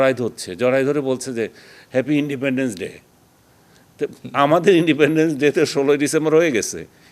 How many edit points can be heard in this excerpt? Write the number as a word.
zero